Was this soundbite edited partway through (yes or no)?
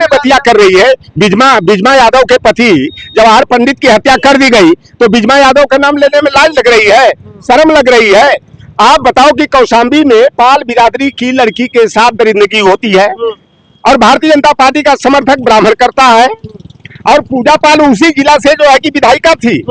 no